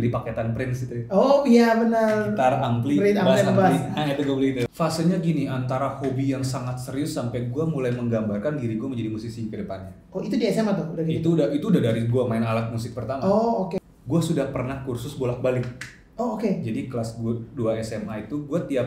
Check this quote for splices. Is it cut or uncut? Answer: cut